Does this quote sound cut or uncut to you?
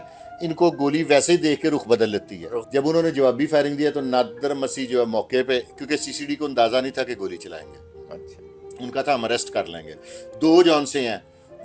cut